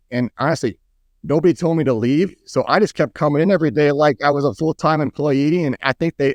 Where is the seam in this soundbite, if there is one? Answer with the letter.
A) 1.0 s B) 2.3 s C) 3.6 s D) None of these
D